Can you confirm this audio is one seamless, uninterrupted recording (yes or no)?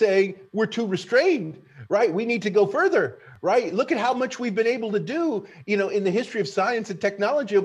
yes